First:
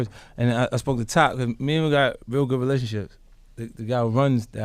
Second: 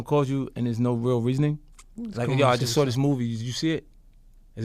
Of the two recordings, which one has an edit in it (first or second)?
second